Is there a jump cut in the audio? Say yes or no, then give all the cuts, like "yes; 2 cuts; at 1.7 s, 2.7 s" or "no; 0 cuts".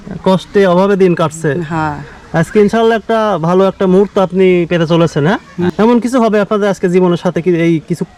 no; 0 cuts